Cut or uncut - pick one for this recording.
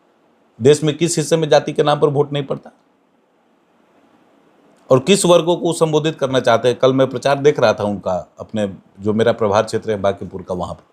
uncut